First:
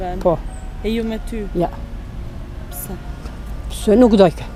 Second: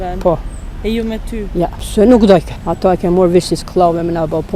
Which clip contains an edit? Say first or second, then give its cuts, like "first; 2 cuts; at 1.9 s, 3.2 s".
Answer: second; 2 cuts; at 1.8 s, 2.6 s